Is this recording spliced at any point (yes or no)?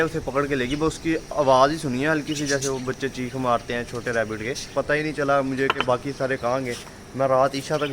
yes